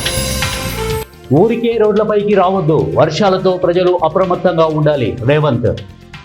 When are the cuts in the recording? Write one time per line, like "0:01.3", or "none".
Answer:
0:01.0